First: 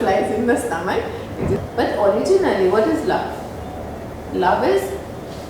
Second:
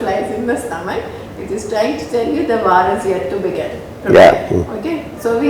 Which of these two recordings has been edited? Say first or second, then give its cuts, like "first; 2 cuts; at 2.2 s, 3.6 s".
first; 1 cut; at 1.6 s